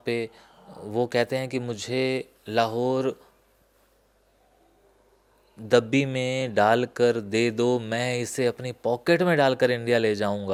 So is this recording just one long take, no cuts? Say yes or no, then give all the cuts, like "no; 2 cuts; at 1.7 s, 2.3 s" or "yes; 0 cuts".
yes; 0 cuts